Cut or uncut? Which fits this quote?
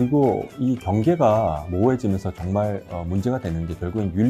uncut